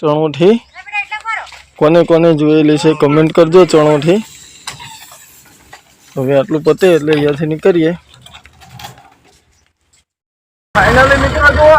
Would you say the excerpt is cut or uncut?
uncut